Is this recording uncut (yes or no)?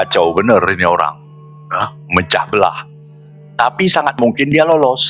yes